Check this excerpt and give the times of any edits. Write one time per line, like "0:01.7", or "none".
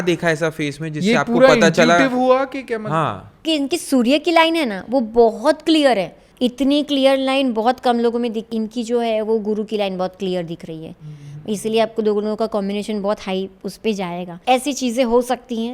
0:03.4
0:06.2
0:08.4
0:14.4